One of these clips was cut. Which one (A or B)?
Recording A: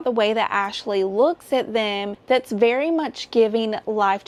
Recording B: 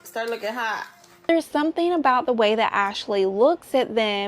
B